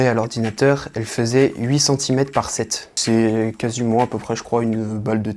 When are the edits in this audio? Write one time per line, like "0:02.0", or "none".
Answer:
0:02.9